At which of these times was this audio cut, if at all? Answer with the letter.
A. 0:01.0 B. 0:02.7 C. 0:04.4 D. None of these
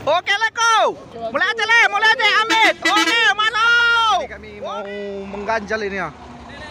C